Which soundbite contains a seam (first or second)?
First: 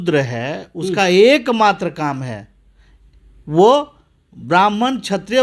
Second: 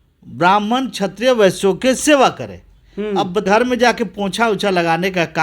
second